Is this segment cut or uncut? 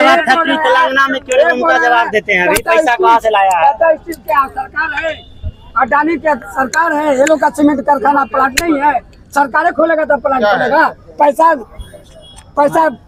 uncut